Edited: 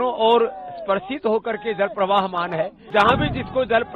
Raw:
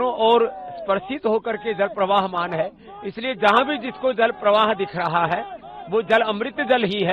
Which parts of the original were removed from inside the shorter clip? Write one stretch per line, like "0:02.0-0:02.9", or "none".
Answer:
0:02.8-0:03.3